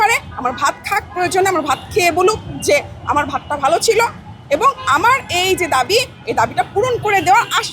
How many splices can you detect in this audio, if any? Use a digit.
0